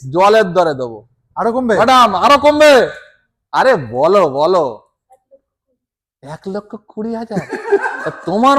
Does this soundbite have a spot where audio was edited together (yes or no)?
no